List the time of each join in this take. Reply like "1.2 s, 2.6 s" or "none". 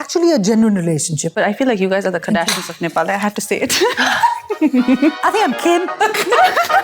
1.4 s, 5.2 s